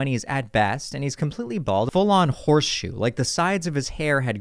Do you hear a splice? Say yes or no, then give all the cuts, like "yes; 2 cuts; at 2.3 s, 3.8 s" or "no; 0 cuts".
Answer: yes; 1 cut; at 1.9 s